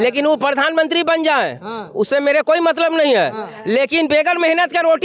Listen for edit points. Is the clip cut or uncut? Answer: uncut